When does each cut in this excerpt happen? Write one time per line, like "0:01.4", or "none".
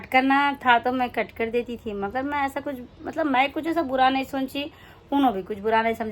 none